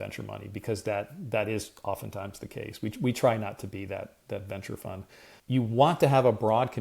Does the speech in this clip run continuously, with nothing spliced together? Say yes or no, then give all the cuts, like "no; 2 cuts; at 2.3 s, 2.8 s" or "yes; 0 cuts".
no; 1 cut; at 5.3 s